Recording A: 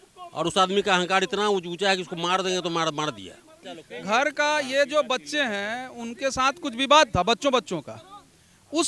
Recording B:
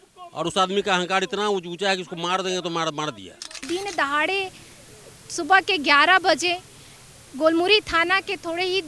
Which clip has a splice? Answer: B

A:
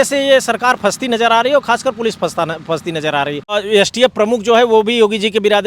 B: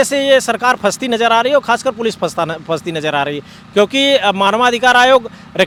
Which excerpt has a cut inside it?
A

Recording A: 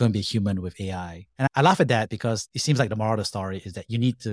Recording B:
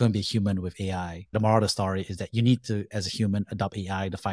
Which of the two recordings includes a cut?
B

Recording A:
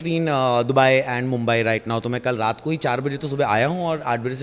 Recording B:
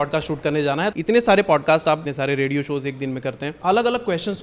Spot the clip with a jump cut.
B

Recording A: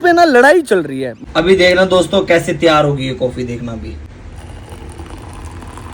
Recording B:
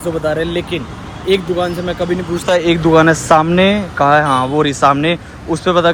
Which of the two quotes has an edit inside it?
A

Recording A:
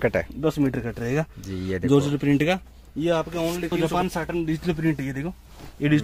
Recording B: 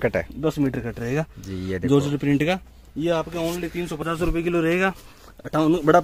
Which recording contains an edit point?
A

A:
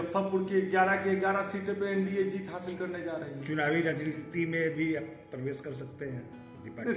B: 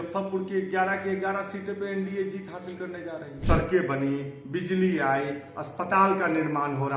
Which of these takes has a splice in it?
B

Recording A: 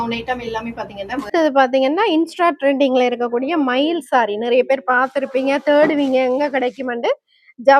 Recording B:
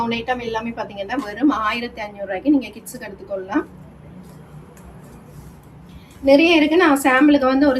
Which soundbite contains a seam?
A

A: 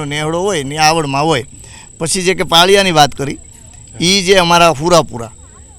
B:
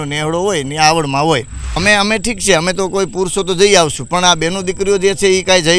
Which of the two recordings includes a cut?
B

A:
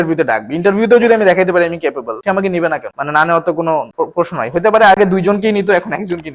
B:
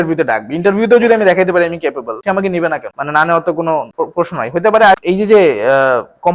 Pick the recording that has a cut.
B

